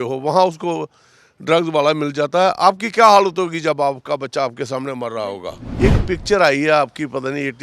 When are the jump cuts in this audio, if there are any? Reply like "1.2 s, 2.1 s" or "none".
5.6 s